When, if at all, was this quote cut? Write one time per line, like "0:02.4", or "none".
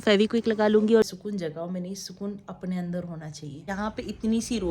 0:01.1
0:03.7

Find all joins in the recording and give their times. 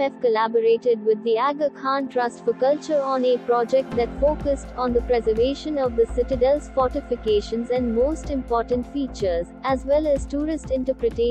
none

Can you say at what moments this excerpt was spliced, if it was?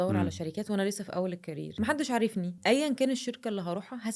0:01.8
0:02.6

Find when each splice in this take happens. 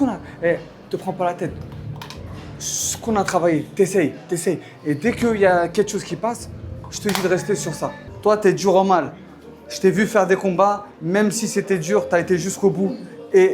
0:08.1

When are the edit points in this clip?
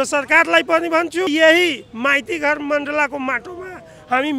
0:01.3

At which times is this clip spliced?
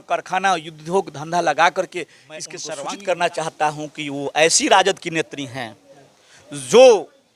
0:02.6

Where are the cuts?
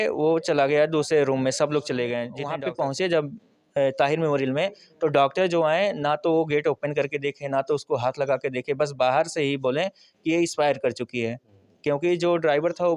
0:02.4

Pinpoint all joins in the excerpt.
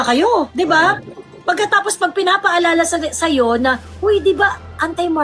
none

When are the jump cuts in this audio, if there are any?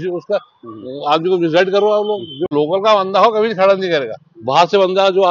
0:02.5

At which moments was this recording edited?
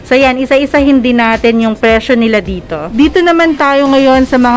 0:02.8

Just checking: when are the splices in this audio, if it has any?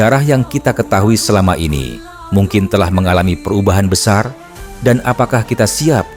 none

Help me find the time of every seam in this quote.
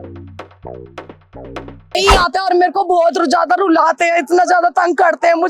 0:02.0

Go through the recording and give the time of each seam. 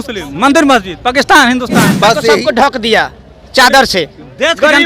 0:02.4

